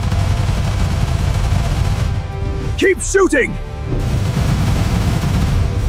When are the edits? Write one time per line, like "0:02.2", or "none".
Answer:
none

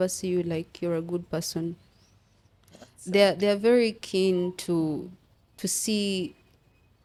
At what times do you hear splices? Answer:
none

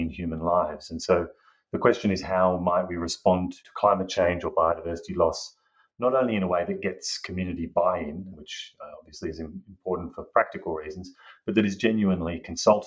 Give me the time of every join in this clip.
0:03.6
0:08.3

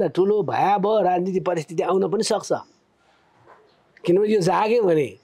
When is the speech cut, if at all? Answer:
none

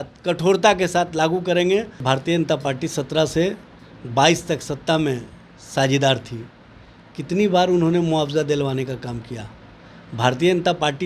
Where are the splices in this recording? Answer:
0:02.0

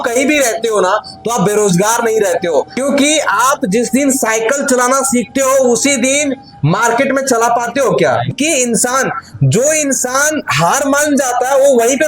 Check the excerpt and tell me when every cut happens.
0:02.7
0:08.3

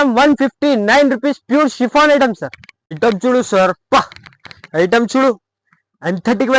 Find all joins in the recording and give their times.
0:02.4

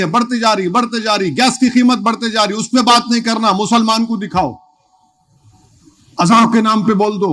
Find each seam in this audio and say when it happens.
none

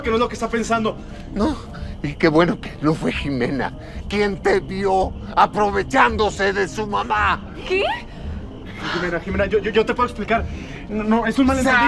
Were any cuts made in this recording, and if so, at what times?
0:01.1

